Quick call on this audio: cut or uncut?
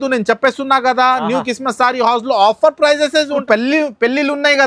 cut